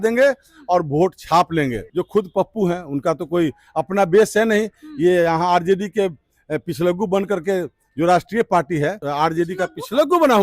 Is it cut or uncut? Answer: cut